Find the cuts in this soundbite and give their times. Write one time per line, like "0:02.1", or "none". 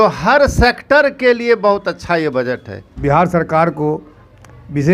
0:02.9